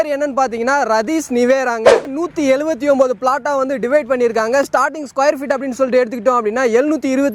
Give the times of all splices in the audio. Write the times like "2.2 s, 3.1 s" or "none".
2.1 s